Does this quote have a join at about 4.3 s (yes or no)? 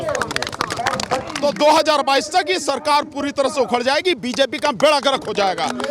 no